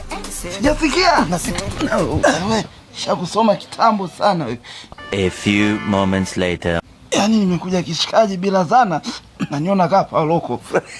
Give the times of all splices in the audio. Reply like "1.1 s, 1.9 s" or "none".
none